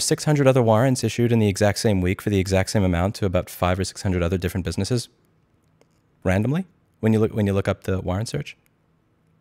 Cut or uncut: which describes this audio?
uncut